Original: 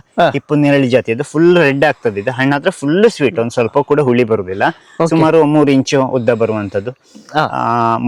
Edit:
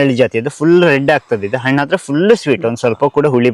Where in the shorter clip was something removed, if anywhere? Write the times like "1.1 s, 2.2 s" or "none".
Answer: none